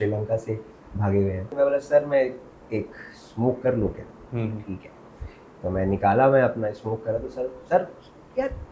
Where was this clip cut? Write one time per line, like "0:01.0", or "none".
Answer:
0:01.4